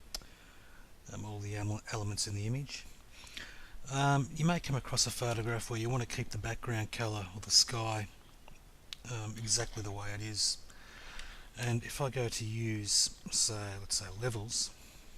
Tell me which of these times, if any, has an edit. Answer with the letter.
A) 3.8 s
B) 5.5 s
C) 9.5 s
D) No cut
B